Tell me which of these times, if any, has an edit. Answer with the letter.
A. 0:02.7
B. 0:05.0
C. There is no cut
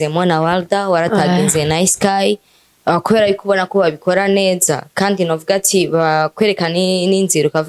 C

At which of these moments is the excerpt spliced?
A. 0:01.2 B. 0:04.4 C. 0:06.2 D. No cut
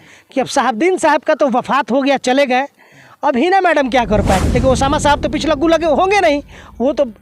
B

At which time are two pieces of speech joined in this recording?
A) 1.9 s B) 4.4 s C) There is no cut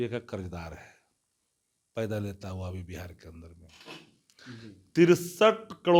C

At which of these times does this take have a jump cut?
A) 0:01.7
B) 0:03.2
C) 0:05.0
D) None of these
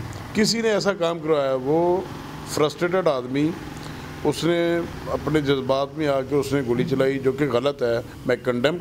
C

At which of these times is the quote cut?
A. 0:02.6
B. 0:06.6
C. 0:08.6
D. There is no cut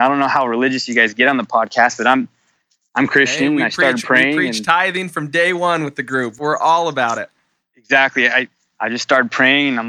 C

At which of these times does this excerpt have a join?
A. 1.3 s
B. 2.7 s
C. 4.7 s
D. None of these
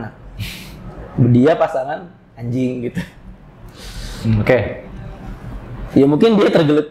D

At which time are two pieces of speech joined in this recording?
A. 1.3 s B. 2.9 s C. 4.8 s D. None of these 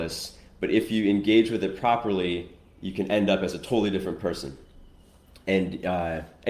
D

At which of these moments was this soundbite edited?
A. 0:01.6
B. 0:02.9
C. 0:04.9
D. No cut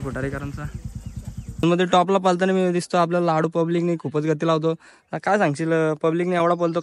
A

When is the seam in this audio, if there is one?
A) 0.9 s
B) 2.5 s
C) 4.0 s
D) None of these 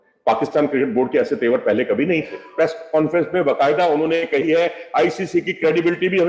B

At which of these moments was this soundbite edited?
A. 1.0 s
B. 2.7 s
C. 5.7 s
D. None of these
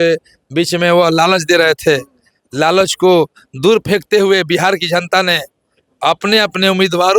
D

